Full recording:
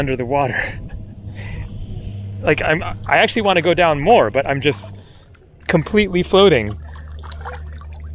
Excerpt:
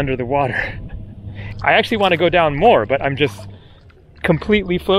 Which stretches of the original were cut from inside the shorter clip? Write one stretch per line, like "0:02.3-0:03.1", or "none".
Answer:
0:01.5-0:02.9